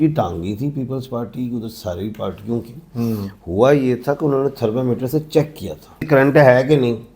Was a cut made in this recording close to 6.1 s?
yes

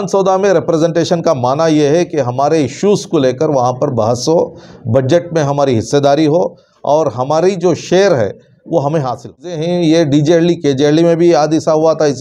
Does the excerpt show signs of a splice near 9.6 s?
yes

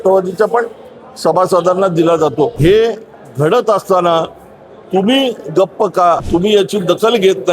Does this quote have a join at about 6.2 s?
yes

